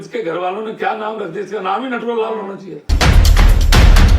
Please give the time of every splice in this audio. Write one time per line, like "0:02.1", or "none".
0:02.8